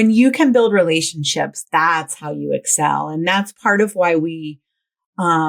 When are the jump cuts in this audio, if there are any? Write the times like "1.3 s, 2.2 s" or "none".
none